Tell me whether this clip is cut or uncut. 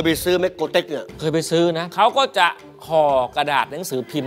cut